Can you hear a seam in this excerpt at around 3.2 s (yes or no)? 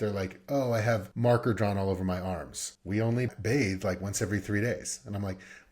yes